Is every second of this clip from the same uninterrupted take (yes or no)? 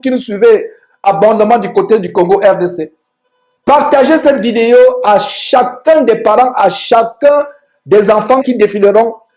no